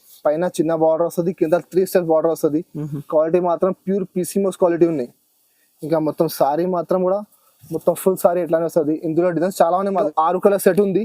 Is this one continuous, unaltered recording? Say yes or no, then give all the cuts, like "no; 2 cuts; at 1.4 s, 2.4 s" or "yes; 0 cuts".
no; 1 cut; at 10.1 s